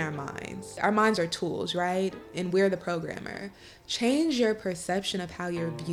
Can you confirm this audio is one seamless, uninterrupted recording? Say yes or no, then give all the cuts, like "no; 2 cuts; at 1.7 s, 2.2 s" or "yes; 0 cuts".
yes; 0 cuts